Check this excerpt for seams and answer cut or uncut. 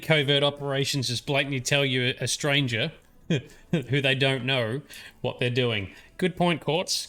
uncut